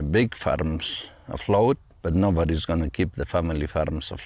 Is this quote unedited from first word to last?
no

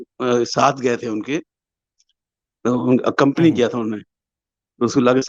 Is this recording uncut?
yes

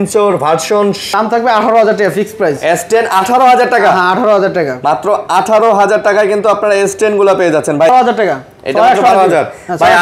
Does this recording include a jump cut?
yes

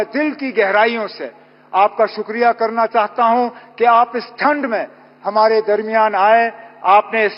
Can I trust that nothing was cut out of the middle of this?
yes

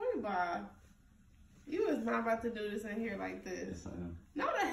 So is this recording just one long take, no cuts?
yes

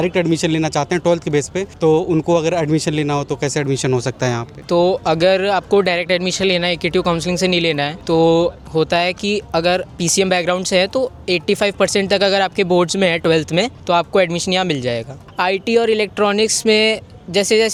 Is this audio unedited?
yes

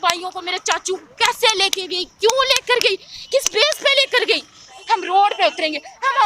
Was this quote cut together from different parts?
yes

